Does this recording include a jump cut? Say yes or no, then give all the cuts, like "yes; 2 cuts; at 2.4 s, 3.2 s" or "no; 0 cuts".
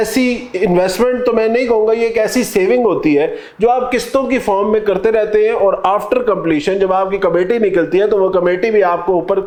no; 0 cuts